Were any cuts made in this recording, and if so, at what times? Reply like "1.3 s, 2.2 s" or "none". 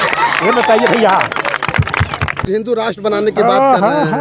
2.5 s